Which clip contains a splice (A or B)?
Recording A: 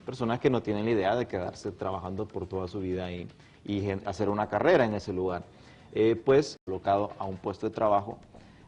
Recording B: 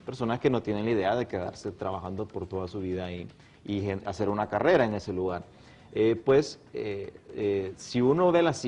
B